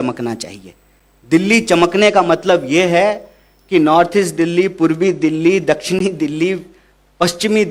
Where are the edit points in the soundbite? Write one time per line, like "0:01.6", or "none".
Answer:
none